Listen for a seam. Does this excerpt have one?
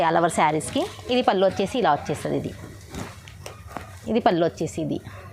no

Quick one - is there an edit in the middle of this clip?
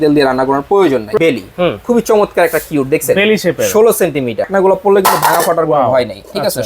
yes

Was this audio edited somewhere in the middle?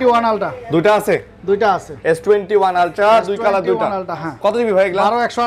no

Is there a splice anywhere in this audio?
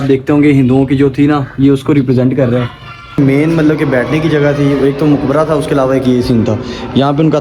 yes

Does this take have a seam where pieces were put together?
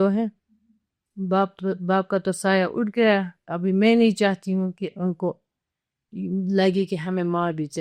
no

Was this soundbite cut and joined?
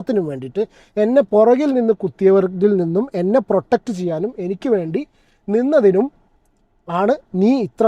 no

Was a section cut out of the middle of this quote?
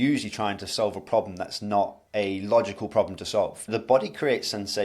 yes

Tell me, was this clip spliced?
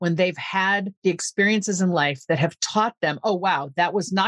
yes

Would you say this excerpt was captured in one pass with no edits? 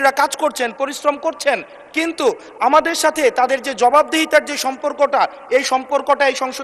yes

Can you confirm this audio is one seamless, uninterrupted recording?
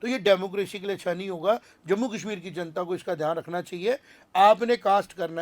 yes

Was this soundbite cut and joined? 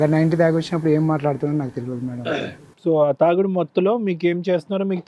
no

